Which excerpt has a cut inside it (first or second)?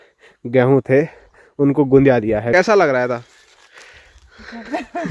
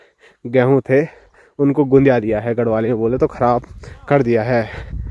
first